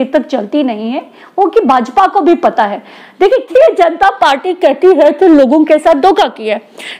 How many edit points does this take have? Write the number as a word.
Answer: one